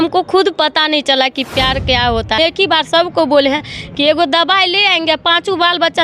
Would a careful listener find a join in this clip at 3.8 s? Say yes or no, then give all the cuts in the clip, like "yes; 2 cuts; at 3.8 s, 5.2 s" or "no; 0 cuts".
no; 1 cut; at 2.4 s